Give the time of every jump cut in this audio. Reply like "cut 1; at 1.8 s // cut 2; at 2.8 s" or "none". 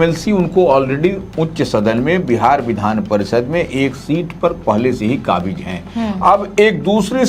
none